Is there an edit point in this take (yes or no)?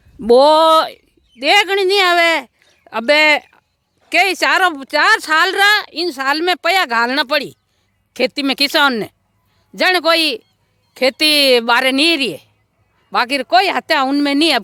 no